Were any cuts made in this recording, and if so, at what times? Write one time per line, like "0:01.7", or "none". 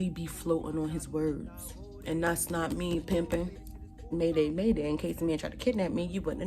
0:04.1